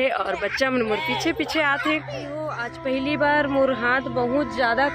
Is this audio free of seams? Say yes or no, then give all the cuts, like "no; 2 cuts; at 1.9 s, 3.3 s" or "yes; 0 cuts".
no; 1 cut; at 2.7 s